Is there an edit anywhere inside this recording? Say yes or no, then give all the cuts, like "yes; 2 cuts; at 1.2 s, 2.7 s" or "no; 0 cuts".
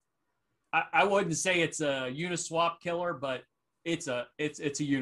no; 0 cuts